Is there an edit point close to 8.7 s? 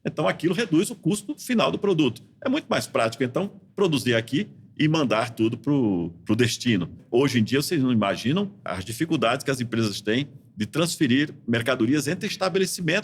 yes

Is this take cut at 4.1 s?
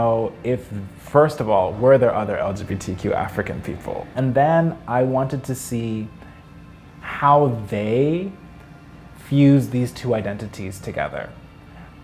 yes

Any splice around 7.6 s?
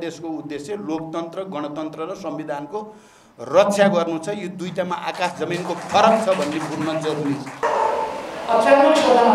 yes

